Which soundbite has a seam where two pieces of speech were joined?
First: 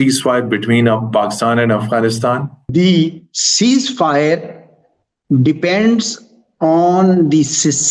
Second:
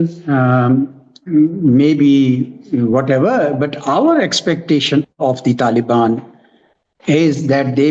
first; 1 cut; at 2.7 s

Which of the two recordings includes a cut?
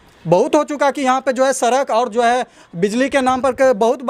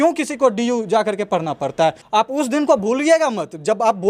second; 1 cut; at 2.0 s

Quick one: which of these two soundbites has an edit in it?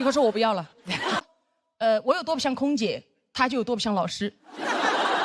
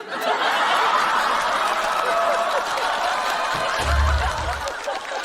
first; 1 cut; at 1.2 s

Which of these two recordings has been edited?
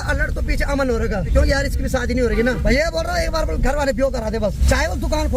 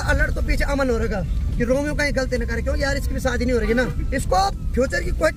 first; 3 cuts; at 1.3 s, 2.6 s, 4.6 s

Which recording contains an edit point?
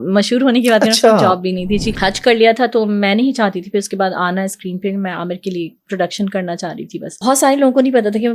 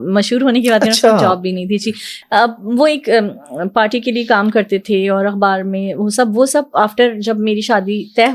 first; 2 cuts; at 1.9 s, 7.2 s

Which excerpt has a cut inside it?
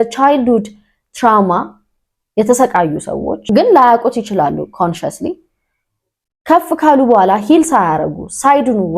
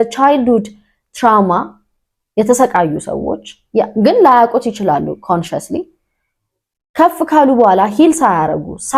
first; 1 cut; at 3.4 s

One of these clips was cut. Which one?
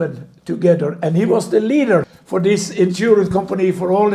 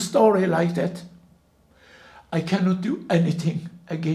first; 1 cut; at 2.2 s

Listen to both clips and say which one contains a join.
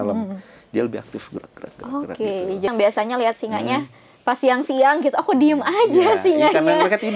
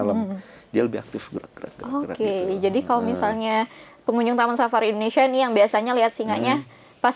first; 1 cut; at 2.7 s

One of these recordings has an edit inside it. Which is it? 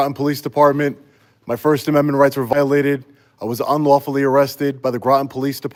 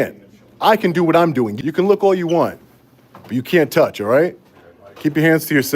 second; 1 cut; at 1.5 s

